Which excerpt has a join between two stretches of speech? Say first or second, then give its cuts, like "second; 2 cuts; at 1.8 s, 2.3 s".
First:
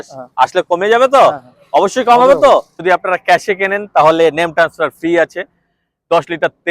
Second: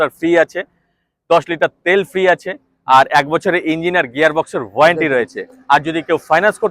first; 1 cut; at 2.8 s